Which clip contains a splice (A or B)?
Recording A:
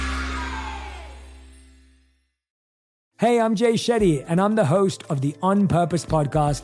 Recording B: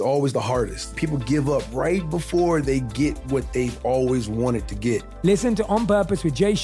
B